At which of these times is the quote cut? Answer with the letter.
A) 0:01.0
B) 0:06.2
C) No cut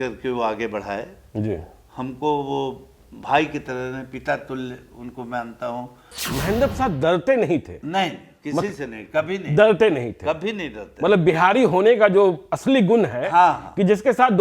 B